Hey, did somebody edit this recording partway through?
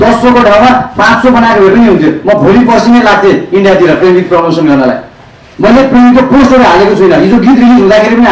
no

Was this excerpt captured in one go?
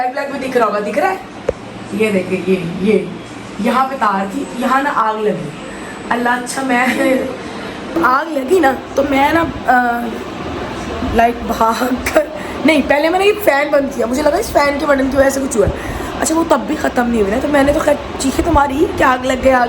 yes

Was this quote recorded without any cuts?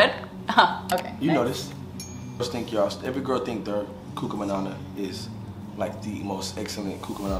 no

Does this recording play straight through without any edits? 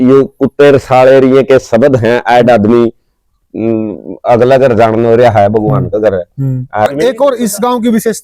no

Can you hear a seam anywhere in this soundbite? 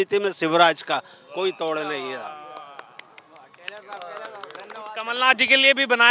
no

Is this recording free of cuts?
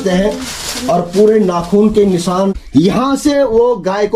no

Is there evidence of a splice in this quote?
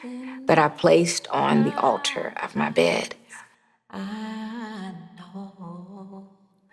no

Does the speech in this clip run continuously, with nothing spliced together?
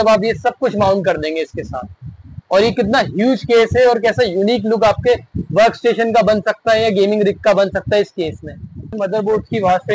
no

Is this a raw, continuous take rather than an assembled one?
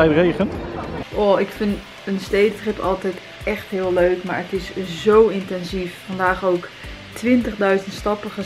no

